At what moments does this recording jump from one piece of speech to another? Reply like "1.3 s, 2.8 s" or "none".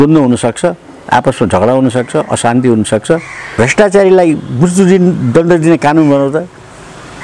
3.4 s

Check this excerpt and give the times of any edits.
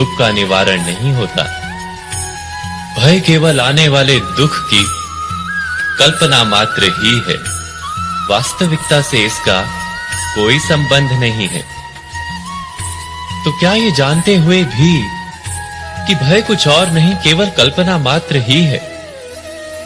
none

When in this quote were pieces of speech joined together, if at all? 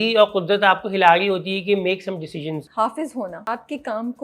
2.6 s, 3.4 s

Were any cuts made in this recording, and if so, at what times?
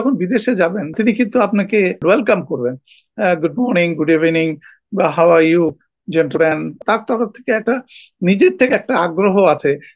0.9 s, 2.0 s, 6.8 s

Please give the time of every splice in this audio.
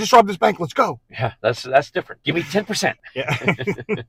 2.1 s, 3.0 s

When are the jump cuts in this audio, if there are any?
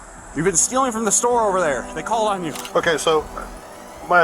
2.6 s

